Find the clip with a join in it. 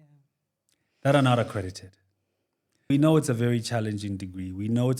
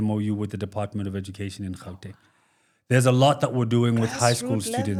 first; 1 cut; at 2.9 s

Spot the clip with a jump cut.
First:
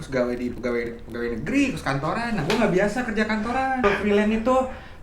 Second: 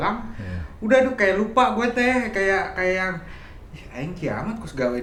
first; 1 cut; at 3.8 s

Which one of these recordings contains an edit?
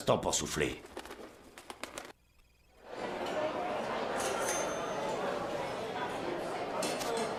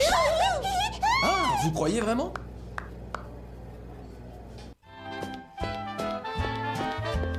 second; 1 cut; at 4.7 s

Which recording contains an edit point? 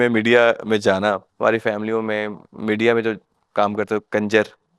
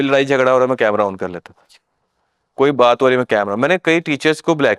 first; 1 cut; at 1.3 s

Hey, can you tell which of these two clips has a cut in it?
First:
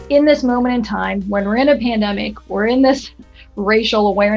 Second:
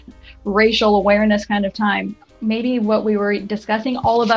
second; 1 cut; at 2.3 s

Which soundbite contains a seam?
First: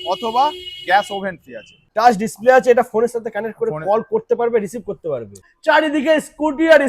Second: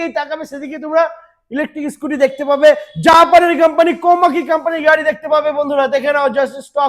first; 2 cuts; at 1.9 s, 5.5 s

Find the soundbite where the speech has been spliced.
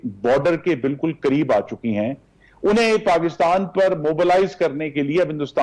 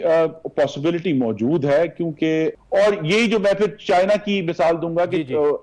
second; 1 cut; at 2.6 s

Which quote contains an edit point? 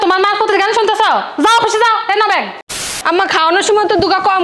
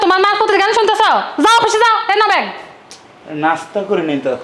first; 1 cut; at 3.0 s

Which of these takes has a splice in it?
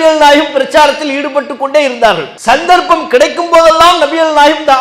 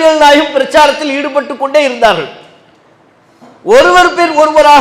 first; 1 cut; at 2.3 s

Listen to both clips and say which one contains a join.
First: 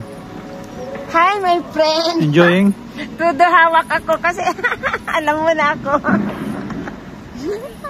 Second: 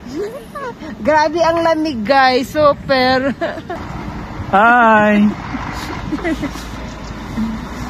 second; 1 cut; at 3.9 s

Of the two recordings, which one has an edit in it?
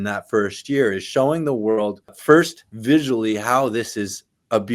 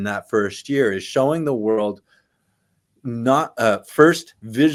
first; 1 cut; at 2.2 s

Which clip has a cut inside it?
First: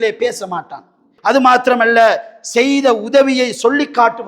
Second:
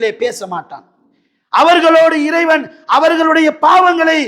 first; 1 cut; at 1.1 s

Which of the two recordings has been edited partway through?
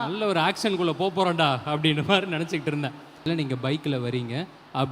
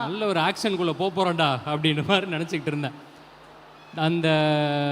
first; 1 cut; at 3.3 s

